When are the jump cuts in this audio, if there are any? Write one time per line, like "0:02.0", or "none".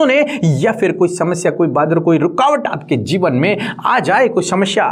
none